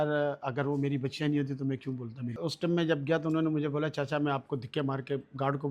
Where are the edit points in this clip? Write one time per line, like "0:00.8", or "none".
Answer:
0:02.4